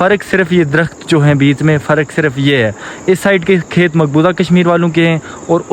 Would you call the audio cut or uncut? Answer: uncut